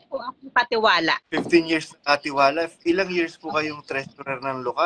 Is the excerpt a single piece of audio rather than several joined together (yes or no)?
yes